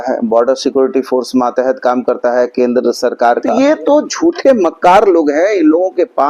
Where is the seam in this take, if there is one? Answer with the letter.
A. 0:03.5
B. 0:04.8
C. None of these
A